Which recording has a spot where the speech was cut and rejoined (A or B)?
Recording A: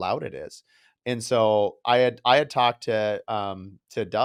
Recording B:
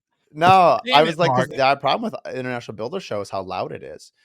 B